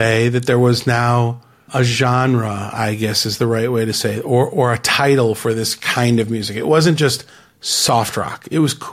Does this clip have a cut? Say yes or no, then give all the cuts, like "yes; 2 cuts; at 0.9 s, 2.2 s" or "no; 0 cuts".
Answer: yes; 1 cut; at 1.6 s